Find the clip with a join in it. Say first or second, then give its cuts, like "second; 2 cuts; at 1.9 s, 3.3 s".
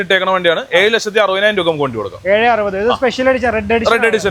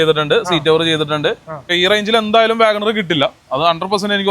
second; 1 cut; at 1.7 s